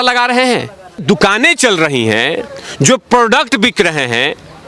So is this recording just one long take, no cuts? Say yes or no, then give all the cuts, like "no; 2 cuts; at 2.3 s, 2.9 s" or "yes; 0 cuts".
no; 1 cut; at 1.0 s